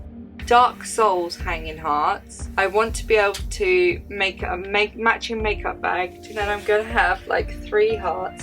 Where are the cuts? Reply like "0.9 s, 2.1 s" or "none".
2.4 s, 6.2 s